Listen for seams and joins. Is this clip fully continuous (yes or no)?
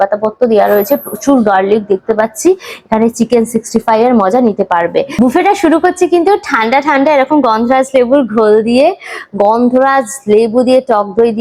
yes